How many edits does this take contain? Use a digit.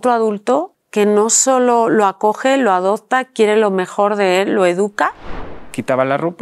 1